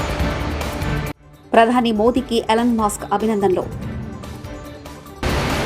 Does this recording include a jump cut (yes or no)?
yes